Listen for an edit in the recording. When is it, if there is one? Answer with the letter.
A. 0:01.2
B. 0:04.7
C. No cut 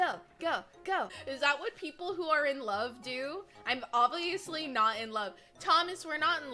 A